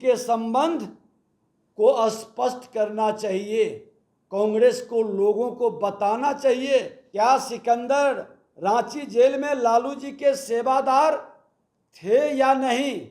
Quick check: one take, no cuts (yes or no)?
no